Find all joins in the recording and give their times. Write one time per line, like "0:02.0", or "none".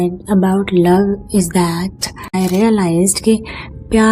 0:02.3